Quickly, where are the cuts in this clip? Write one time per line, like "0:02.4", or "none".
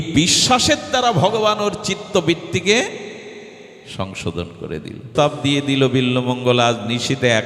0:05.1